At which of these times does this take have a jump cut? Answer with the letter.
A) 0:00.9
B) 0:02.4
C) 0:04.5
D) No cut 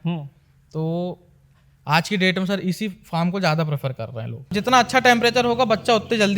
C